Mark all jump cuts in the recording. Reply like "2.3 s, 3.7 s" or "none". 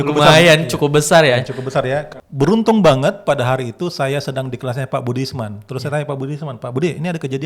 2.1 s